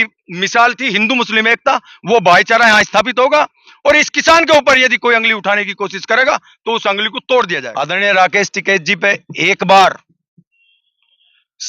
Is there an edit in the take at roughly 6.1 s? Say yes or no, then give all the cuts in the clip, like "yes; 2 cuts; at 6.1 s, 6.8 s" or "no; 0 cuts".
no; 1 cut; at 7.7 s